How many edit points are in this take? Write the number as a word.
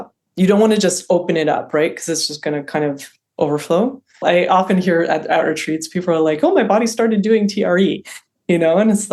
one